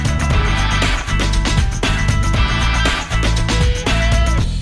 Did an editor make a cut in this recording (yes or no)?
no